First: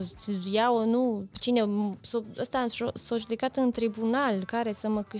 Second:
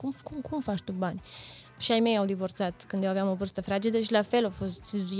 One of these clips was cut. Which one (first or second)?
second